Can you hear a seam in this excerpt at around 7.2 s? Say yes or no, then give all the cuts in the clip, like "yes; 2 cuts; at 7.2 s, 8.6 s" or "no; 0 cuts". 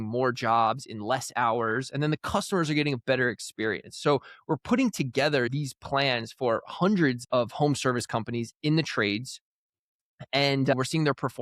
yes; 1 cut; at 7.2 s